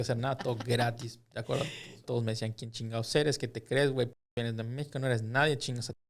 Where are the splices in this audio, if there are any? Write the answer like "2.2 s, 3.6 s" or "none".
2.0 s